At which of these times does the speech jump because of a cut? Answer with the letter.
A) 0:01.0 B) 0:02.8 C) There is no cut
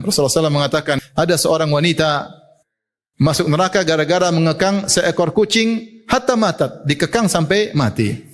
A